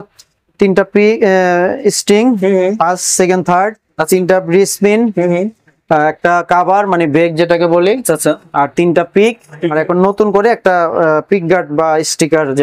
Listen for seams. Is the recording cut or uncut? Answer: uncut